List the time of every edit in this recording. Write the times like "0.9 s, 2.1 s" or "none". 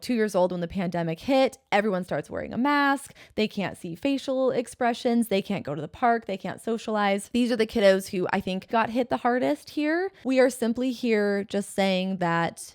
7.2 s, 8.7 s, 10.1 s